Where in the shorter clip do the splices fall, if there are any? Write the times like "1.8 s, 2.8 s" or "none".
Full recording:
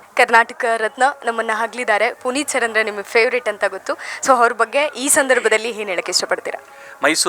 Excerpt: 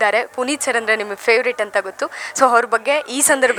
none

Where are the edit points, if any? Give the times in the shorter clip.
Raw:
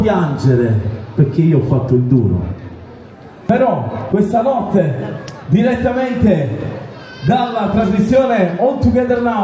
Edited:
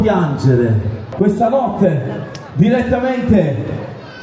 1.0 s

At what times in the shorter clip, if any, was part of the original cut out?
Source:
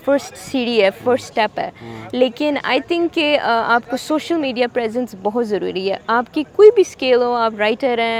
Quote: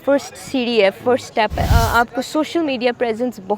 1.7 s

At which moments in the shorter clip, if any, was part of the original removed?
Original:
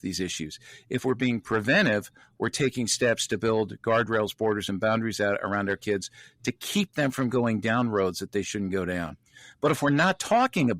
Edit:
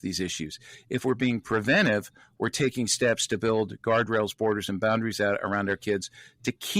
none

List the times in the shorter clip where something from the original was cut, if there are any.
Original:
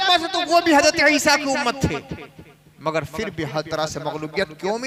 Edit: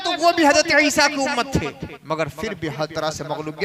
1.9 s

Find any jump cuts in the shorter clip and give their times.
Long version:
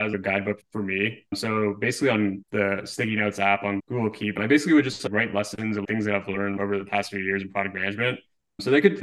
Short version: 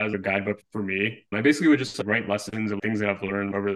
1.3 s

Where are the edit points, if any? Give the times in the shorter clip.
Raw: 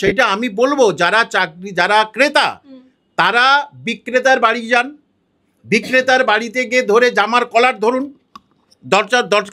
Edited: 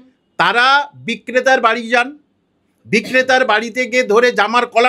none

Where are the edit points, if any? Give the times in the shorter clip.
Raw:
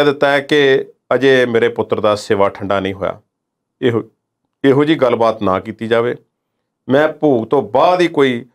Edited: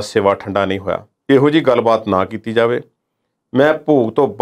1.1 s

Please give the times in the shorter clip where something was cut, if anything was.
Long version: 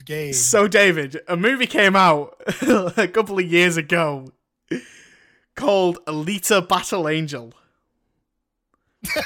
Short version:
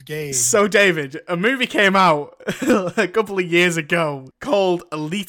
4.3 s

